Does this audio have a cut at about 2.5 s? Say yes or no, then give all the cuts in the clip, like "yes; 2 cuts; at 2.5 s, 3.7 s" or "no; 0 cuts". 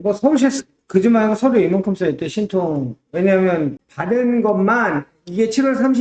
no; 1 cut; at 3.9 s